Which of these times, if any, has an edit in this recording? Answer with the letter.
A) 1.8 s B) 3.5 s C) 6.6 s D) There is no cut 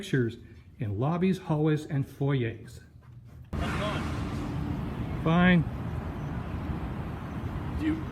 B